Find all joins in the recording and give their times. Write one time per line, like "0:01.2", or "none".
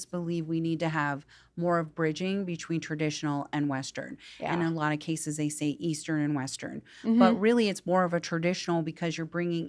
none

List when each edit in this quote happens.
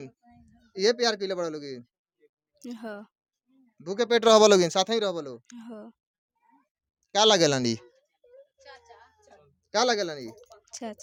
none

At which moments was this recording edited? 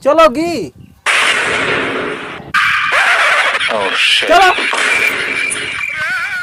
none

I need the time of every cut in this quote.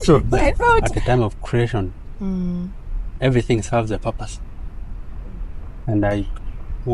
0:00.9

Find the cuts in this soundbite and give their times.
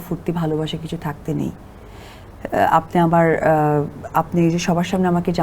none

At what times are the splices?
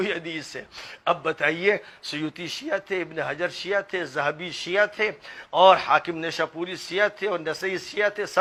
none

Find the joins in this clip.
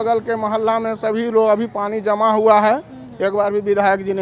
none

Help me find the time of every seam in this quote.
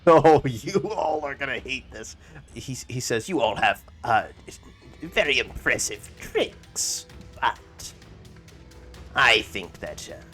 0:02.4

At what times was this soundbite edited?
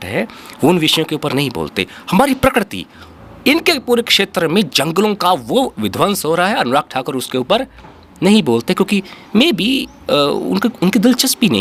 none

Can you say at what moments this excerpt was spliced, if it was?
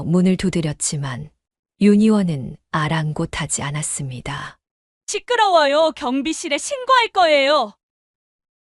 0:07.8

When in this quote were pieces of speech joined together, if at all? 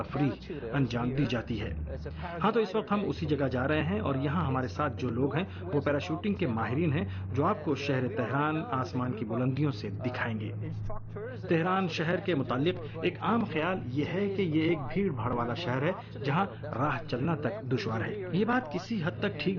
0:12.2

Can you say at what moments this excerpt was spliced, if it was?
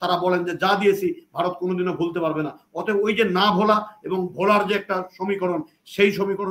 none

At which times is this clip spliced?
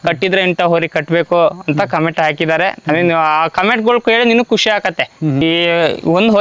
0:05.4

